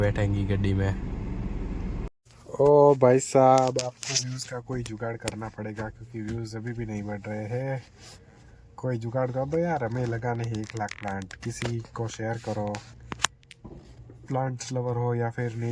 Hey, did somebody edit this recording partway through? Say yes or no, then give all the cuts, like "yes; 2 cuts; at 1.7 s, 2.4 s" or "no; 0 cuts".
yes; 1 cut; at 2.1 s